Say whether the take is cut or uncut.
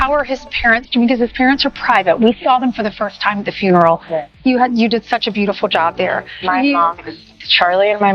cut